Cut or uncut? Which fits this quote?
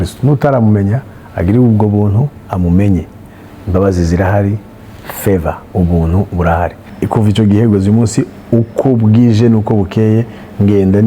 cut